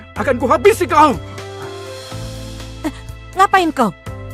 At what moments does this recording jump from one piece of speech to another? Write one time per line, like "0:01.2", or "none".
0:01.2
0:02.8